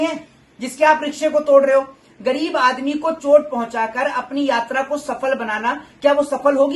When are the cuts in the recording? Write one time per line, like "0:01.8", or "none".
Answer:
none